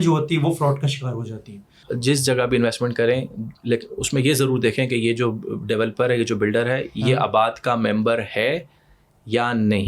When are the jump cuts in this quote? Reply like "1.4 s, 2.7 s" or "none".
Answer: 1.8 s